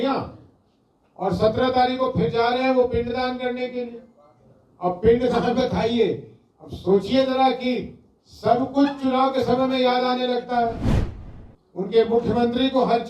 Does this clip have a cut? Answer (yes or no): no